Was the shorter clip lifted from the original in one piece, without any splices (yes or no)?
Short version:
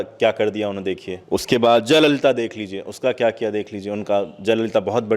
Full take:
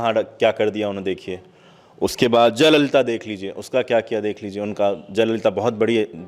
no